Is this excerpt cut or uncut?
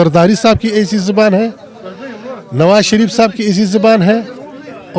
uncut